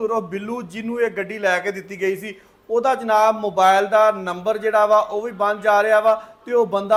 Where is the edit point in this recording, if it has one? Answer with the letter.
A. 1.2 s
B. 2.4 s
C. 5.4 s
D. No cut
D